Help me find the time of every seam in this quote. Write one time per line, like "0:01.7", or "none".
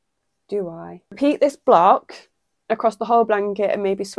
0:01.2